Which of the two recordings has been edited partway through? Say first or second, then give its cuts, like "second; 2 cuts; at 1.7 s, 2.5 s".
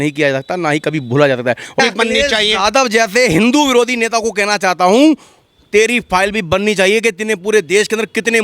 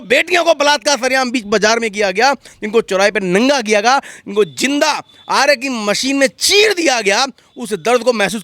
first; 1 cut; at 1.8 s